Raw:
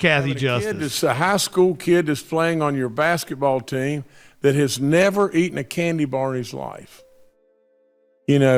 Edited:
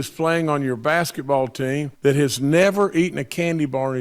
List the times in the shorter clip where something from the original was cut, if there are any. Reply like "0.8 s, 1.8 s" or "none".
1.9 s